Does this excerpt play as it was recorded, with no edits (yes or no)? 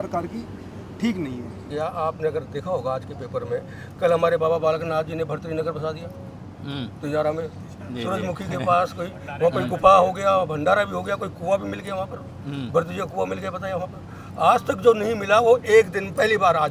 no